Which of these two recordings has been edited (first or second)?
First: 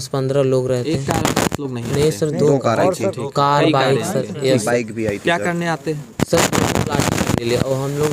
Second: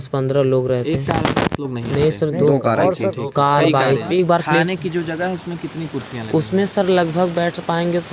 second